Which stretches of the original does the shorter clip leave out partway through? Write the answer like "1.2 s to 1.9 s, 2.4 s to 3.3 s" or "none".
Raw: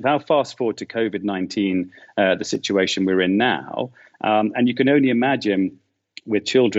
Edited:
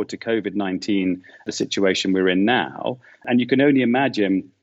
2.1 s to 2.4 s, 4.2 s to 4.5 s